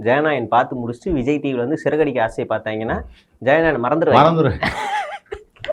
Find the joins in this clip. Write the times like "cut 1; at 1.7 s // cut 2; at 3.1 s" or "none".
none